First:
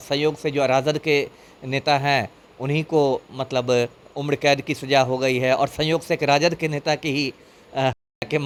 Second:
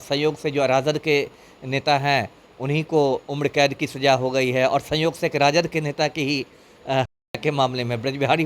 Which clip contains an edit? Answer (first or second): second